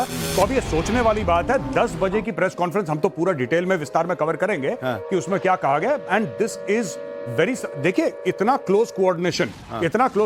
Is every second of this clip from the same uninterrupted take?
no; 1 cut; at 3.6 s

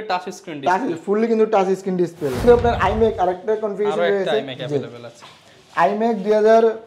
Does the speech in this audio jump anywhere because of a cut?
yes; 1 cut; at 2.4 s

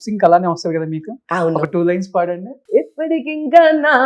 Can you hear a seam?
yes; 1 cut; at 2.5 s

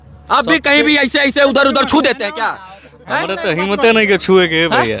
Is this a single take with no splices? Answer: yes; 0 cuts

